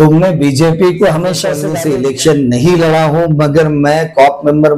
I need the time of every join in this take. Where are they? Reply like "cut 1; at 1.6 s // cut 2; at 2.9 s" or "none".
cut 1; at 1.6 s